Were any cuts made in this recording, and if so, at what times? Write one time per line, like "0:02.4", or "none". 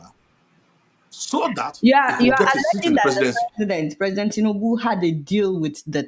none